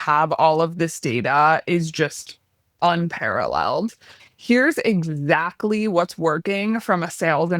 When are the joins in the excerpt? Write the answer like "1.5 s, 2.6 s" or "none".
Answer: 4.2 s